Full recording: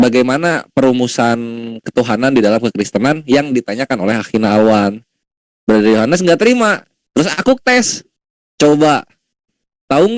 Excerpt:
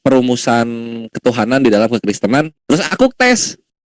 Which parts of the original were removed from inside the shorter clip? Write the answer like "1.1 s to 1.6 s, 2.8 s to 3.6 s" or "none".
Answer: 3.2 s to 7.0 s

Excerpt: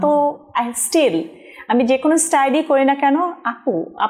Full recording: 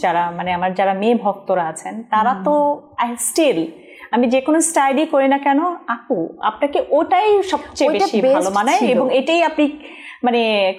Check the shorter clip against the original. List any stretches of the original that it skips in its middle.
none

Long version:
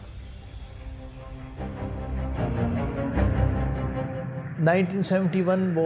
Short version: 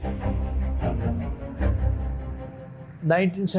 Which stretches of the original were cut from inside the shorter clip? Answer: none

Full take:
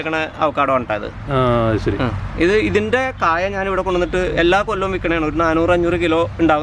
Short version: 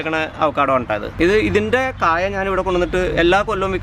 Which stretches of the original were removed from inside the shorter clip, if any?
1.1 s to 2.3 s

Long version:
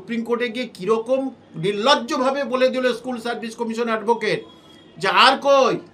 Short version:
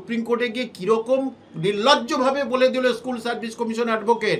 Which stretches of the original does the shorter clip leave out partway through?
none

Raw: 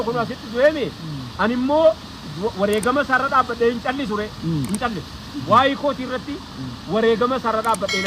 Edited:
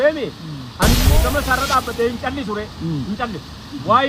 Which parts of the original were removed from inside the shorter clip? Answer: 1.7 s to 2.7 s

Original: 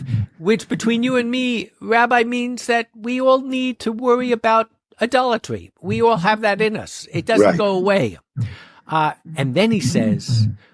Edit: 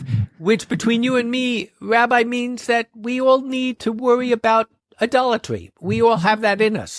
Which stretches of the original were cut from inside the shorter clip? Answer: none

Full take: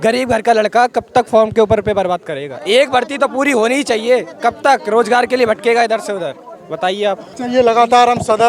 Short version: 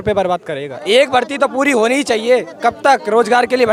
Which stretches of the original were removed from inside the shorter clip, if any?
none

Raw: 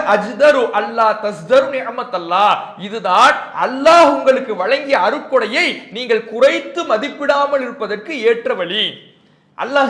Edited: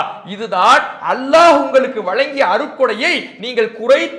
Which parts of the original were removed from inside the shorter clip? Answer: none

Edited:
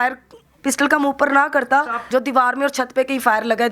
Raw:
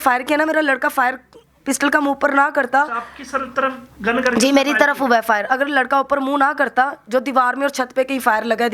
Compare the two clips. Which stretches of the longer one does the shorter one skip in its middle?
3.0 s to 7.0 s

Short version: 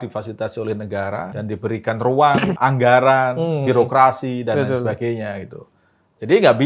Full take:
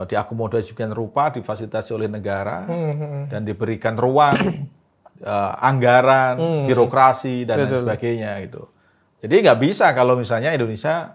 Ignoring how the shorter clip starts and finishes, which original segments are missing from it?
2.6 s to 3.3 s, 4.5 s to 5.6 s

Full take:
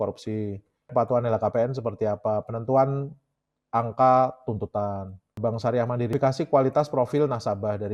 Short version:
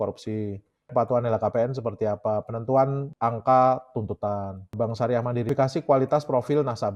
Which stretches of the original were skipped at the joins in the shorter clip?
3.0 s to 3.6 s, 5.1 s to 5.2 s

